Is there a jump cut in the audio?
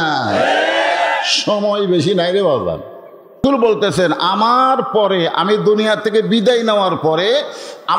yes; 1 cut; at 3.4 s

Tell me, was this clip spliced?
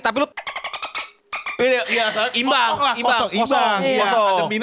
no; 0 cuts

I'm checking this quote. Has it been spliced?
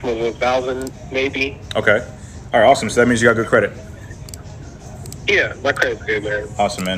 no; 0 cuts

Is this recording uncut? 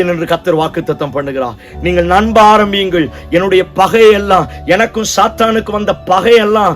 yes; 0 cuts

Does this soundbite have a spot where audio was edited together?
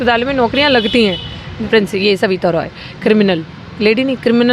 yes; 1 cut; at 1.5 s

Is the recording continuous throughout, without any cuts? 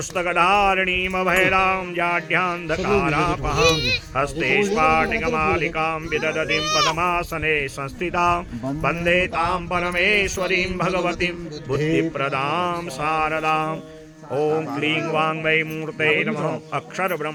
yes; 0 cuts

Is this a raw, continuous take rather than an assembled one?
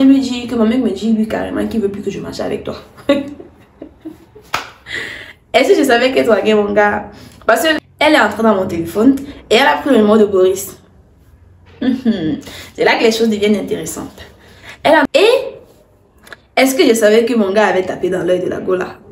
no; 2 cuts; at 7.9 s, 15.1 s

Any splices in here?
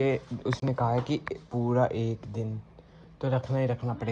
no; 0 cuts

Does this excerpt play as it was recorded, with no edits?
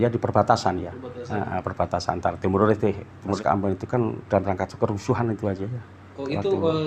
no; 1 cut; at 3.4 s

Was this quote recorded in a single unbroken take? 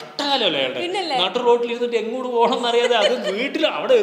yes; 0 cuts

